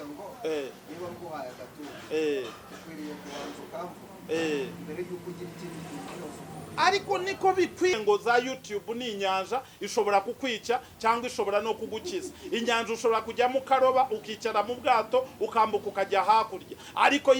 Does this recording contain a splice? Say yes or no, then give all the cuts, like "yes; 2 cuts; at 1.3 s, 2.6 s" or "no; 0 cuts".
yes; 1 cut; at 8.0 s